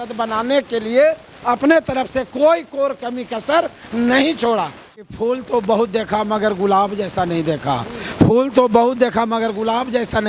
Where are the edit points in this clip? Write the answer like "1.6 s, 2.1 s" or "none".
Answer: 4.8 s